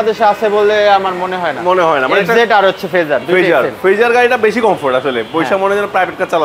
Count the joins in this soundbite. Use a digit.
0